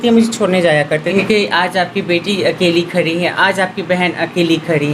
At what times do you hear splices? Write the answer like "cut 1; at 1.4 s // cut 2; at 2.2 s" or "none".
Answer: cut 1; at 1.1 s

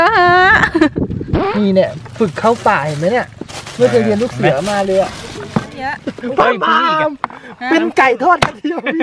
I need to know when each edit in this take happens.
cut 1; at 1.4 s // cut 2; at 5.7 s

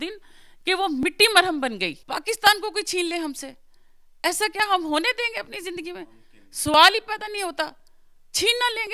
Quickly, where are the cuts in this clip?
cut 1; at 2.0 s

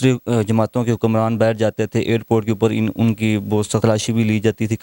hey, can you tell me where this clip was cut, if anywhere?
cut 1; at 3.8 s

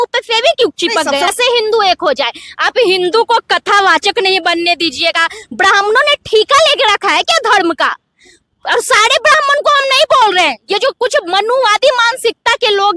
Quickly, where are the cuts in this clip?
cut 1; at 1.3 s

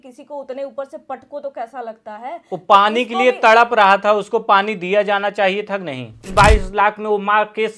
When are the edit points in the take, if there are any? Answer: cut 1; at 6.3 s

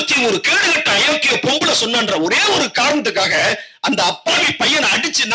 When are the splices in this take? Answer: none

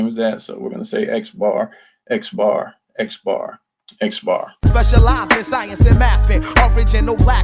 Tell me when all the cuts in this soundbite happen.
cut 1; at 4.5 s

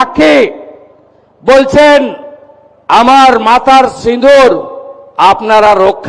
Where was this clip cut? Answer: none

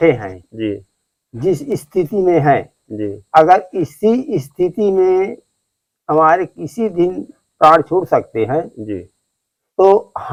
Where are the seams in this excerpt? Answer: none

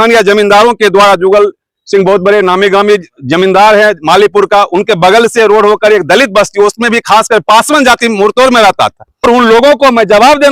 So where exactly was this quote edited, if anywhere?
cut 1; at 9.2 s

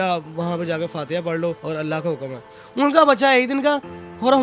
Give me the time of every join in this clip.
cut 1; at 1.6 s // cut 2; at 2.6 s

